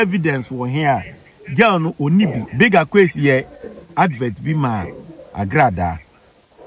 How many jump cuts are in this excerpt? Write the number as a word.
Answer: one